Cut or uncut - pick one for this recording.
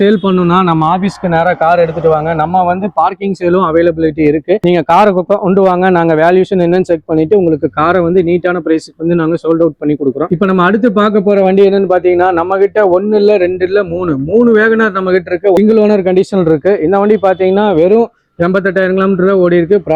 cut